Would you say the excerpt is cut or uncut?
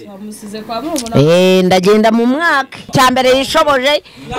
cut